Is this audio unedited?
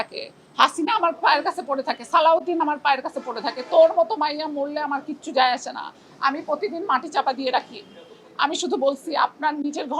yes; 0 cuts

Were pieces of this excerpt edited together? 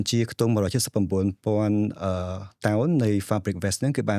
no; 0 cuts

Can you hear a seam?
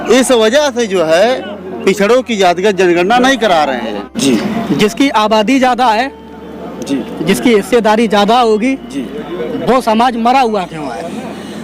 yes; 1 cut; at 4.2 s

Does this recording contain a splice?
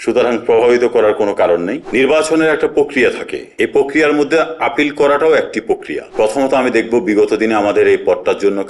yes; 2 cuts; at 1.8 s, 6.0 s

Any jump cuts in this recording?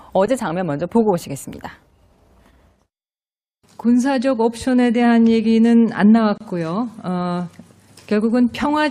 no; 0 cuts

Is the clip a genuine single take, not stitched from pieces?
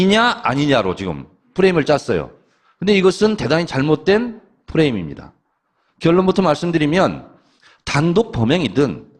no; 1 cut; at 1.8 s

